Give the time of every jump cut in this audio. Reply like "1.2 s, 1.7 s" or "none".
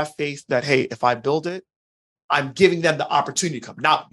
2.0 s